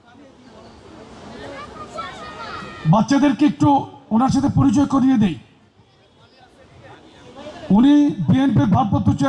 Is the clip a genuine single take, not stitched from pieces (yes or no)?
no